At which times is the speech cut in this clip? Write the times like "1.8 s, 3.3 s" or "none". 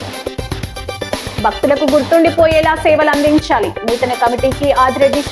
none